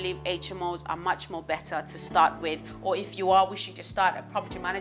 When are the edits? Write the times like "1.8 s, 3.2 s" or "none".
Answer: 2.8 s